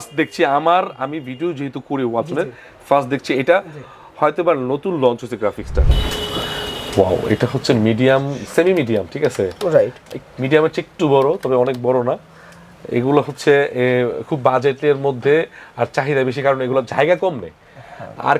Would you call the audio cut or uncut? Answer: cut